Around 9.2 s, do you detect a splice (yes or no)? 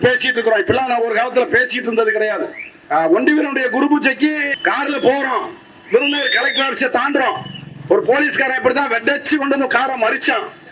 no